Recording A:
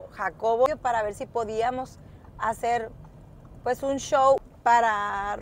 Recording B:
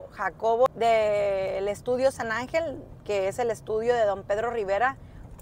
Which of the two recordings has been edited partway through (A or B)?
A